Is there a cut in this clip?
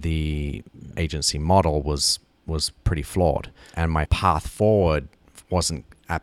yes; 2 cuts; at 0.9 s, 3.9 s

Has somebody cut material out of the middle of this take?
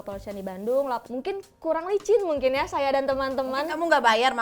yes; 1 cut; at 1.1 s

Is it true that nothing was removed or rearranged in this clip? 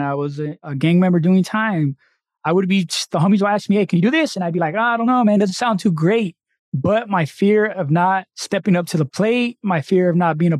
no; 1 cut; at 8.4 s

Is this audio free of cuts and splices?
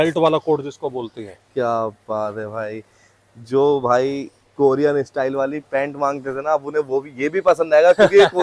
yes; 0 cuts

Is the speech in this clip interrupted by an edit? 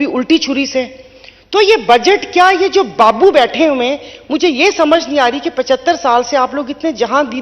no; 0 cuts

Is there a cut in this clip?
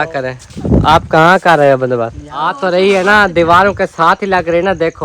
yes; 1 cut; at 2.6 s

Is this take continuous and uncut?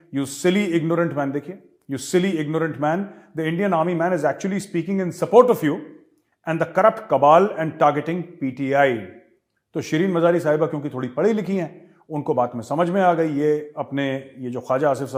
yes; 0 cuts

